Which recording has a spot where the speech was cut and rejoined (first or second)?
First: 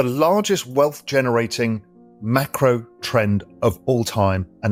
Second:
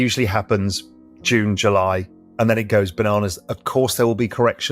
second